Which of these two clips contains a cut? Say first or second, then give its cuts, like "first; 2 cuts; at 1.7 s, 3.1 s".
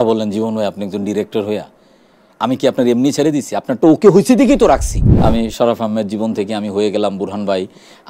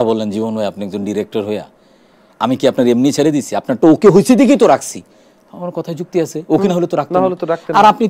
first; 1 cut; at 5.0 s